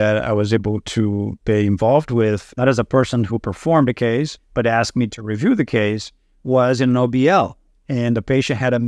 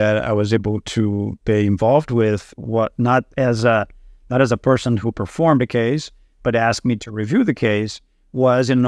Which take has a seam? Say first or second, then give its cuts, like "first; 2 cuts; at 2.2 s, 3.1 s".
first; 2 cuts; at 2.5 s, 4.4 s